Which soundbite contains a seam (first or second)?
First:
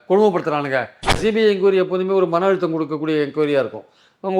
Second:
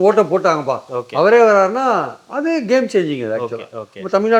first